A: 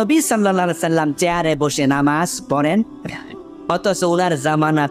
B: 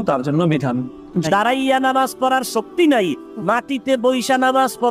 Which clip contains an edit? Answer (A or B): B